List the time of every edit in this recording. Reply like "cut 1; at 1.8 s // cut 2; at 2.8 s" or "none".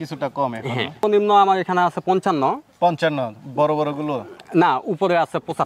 cut 1; at 1.0 s

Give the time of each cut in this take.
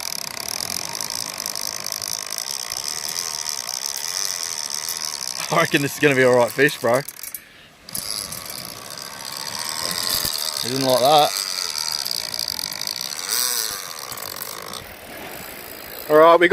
cut 1; at 14.6 s

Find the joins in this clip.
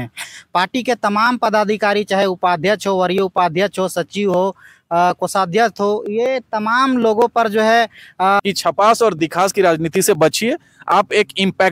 cut 1; at 8.4 s

